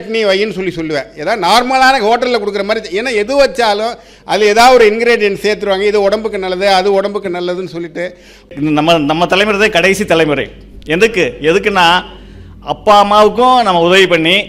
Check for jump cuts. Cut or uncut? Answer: cut